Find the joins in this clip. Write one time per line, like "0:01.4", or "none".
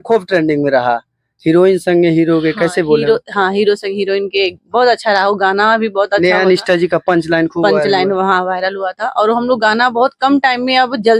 none